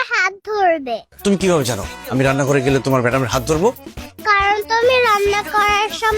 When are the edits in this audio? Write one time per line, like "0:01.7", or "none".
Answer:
0:01.1